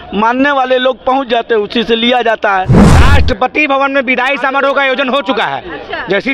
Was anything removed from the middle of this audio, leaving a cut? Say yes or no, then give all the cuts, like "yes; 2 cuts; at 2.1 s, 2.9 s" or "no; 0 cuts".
yes; 1 cut; at 2.8 s